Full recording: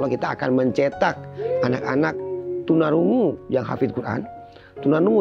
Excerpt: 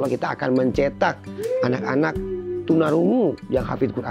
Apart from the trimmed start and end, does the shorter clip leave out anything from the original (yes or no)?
no